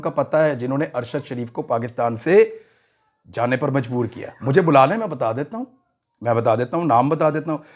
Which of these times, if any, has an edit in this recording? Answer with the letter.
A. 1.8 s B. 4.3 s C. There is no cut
B